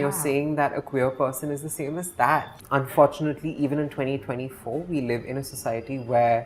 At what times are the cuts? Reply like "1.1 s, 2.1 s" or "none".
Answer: 2.5 s